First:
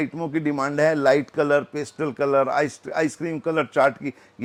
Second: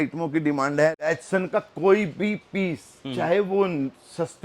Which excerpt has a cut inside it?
second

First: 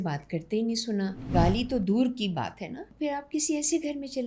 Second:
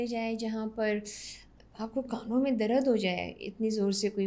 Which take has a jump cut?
first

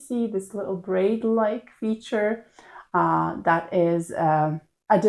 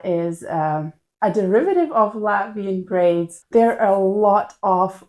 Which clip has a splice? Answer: second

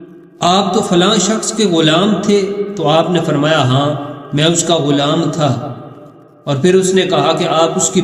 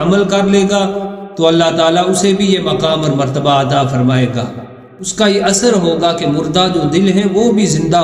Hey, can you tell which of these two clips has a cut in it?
second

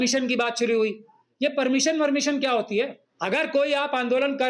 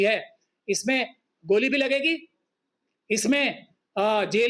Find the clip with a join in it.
first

